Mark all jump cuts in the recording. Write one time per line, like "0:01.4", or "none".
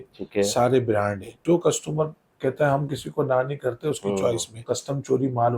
0:01.3
0:04.6